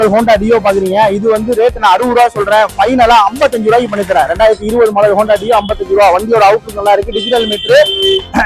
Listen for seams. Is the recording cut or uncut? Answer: uncut